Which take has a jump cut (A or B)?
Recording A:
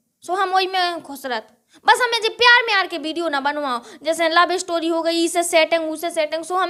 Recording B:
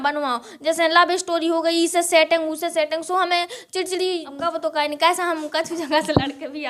B